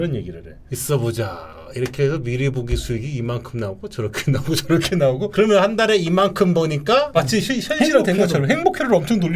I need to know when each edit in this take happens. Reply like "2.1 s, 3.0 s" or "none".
5.3 s, 7.1 s

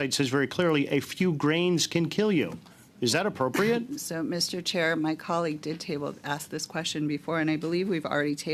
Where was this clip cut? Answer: none

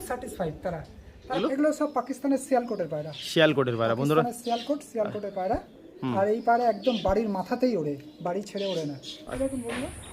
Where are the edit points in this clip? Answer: 1.4 s, 9.2 s

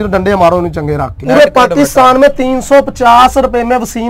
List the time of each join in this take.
1.2 s

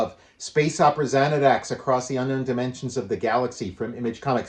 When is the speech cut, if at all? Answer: none

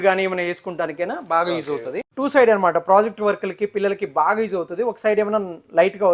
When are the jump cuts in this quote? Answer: 2.1 s

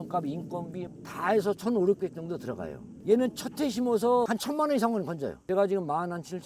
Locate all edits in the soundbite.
2.8 s, 5.4 s

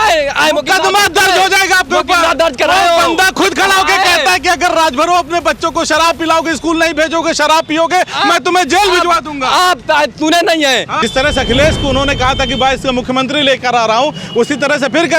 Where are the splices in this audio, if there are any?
10.9 s

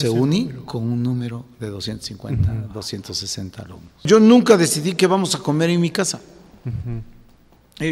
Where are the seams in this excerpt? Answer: 4.0 s

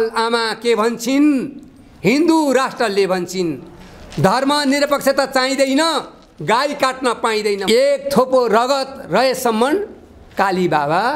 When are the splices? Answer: 7.6 s

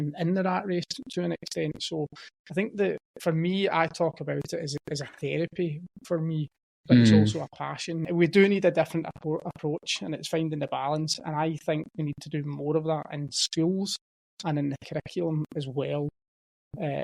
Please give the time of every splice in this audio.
8.1 s

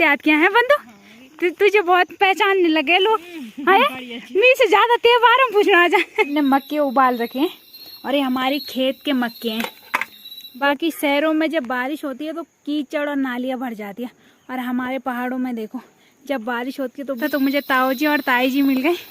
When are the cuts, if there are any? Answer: 6.3 s, 10.6 s, 17.2 s

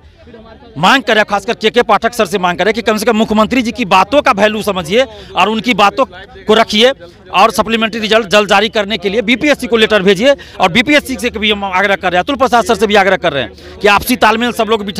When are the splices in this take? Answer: none

